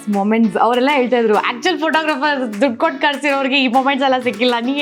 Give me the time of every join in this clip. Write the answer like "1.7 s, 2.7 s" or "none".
none

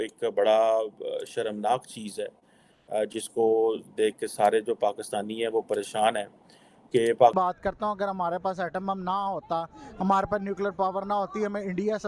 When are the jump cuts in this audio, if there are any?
7.3 s

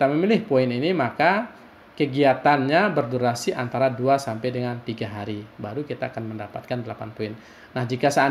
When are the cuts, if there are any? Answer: none

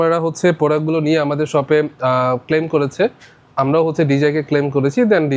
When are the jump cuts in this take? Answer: none

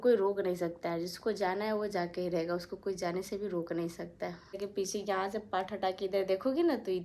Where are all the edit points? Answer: 4.6 s

